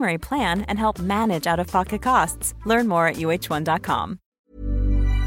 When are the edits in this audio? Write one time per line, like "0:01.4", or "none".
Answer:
0:04.3